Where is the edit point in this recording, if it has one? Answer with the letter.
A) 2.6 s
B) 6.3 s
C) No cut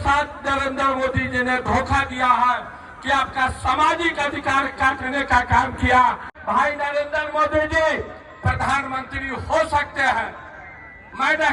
B